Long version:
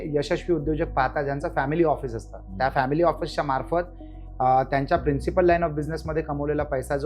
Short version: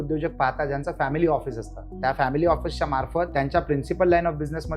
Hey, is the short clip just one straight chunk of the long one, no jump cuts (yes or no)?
no